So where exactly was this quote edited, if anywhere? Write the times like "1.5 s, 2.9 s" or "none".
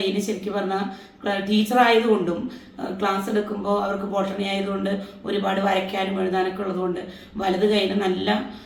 none